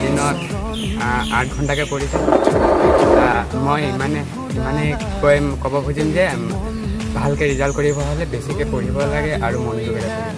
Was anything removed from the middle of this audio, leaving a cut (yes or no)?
no